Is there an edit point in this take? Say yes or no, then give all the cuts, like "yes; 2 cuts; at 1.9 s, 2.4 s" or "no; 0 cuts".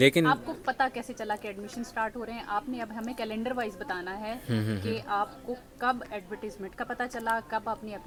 no; 0 cuts